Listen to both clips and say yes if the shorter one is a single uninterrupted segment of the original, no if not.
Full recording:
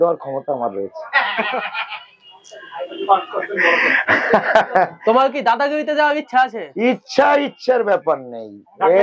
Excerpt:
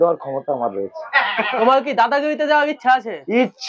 no